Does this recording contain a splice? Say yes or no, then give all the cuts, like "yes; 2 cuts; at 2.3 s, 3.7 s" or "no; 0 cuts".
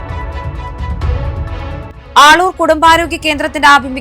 yes; 1 cut; at 1.9 s